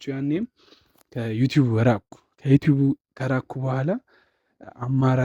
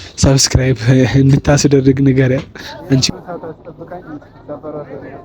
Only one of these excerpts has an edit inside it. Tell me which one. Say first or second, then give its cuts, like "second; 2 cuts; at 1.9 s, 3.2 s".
second; 1 cut; at 3.0 s